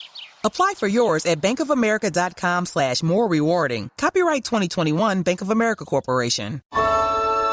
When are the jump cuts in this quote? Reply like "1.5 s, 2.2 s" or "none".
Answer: 6.6 s